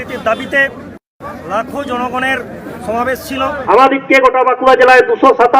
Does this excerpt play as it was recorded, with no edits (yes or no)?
no